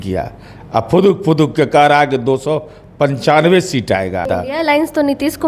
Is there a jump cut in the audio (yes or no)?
yes